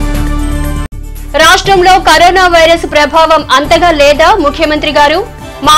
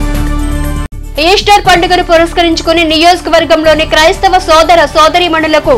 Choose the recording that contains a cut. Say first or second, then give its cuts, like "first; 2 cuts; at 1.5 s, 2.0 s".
first; 1 cut; at 0.9 s